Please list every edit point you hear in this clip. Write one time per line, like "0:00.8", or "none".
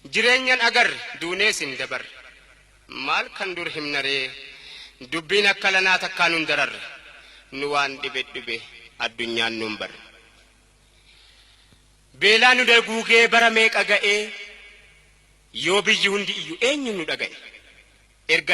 0:06.4